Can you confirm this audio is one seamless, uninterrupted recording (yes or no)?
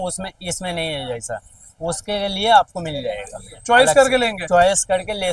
yes